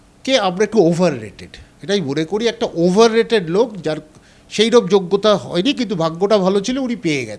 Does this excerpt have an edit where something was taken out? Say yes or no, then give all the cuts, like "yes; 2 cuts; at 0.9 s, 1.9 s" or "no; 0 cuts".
no; 0 cuts